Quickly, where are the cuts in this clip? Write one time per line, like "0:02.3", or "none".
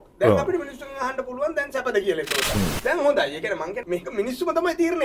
0:02.5
0:03.8